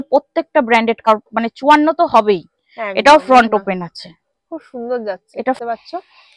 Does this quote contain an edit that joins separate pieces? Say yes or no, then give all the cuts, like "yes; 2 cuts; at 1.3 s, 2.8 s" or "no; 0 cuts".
yes; 2 cuts; at 1.1 s, 5.6 s